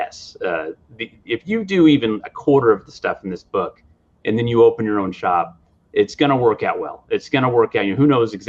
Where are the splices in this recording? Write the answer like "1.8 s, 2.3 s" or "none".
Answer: none